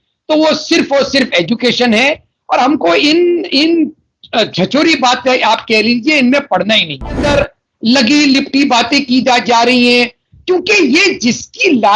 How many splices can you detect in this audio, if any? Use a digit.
1